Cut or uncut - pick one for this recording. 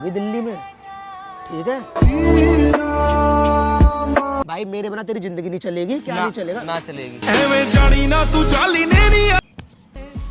cut